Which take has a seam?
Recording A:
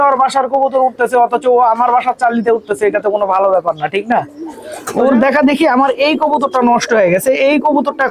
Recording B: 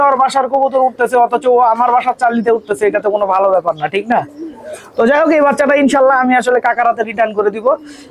A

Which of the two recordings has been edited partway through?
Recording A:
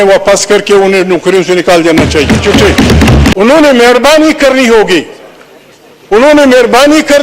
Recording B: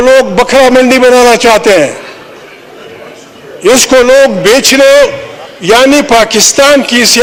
A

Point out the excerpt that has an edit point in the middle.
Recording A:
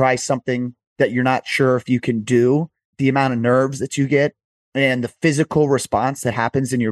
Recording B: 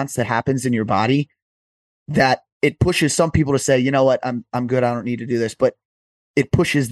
A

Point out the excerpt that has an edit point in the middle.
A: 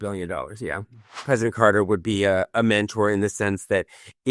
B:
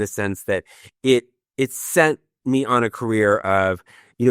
A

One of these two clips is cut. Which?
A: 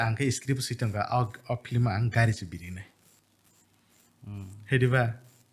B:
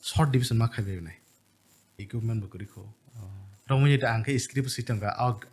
B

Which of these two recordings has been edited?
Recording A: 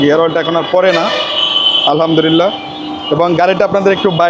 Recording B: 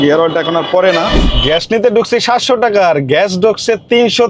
B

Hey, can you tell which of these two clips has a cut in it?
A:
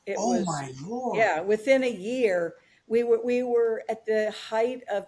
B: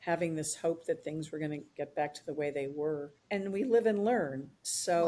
B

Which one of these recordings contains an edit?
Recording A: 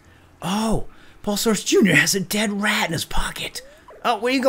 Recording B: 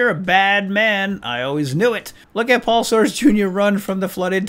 B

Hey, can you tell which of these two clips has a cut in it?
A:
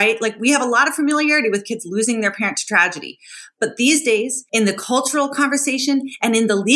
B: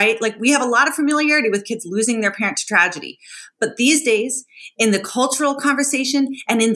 A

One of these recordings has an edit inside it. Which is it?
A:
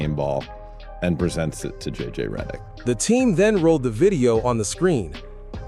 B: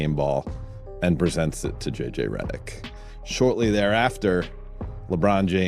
B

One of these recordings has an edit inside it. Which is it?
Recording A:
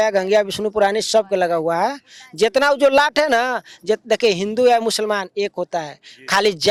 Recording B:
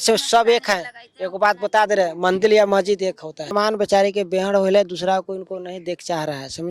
B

